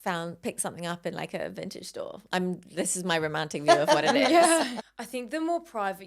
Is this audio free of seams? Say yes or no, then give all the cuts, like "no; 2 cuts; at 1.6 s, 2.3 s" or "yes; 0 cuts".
no; 1 cut; at 4.9 s